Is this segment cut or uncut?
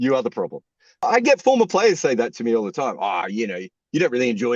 cut